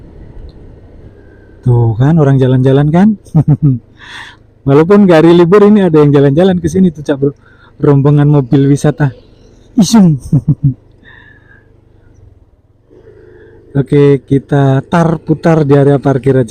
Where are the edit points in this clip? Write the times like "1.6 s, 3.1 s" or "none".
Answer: 1.1 s